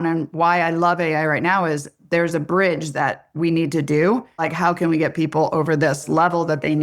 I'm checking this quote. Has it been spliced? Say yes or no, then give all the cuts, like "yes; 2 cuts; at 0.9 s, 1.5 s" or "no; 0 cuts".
yes; 1 cut; at 4.5 s